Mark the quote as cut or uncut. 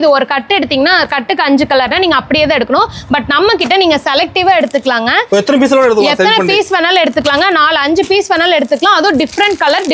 uncut